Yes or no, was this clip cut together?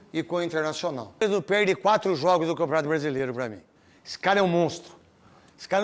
yes